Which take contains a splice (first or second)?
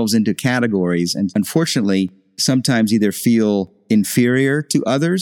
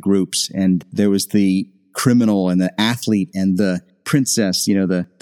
first